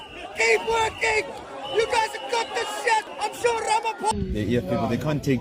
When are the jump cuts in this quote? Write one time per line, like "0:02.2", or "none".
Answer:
0:04.1